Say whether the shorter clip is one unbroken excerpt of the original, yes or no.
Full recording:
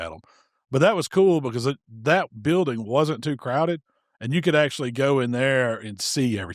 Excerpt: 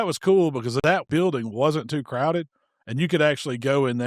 no